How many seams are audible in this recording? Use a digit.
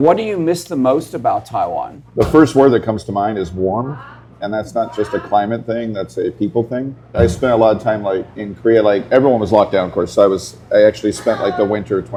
0